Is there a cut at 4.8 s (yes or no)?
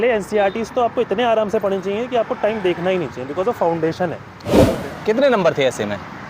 yes